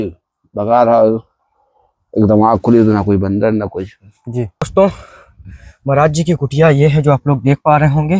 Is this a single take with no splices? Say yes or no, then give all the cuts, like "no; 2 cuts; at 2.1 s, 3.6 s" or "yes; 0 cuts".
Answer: no; 1 cut; at 4.7 s